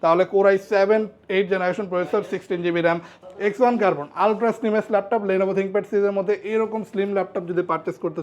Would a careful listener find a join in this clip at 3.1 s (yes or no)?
yes